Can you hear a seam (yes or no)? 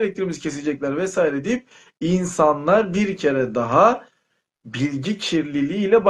no